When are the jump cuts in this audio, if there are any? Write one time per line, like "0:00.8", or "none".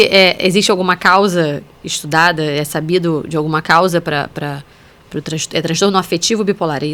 none